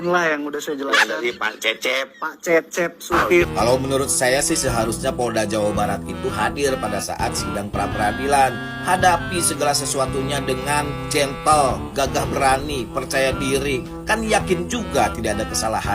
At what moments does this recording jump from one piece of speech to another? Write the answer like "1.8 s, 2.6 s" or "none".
3.4 s